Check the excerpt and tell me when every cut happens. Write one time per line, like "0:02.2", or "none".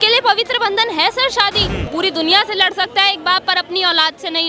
0:01.7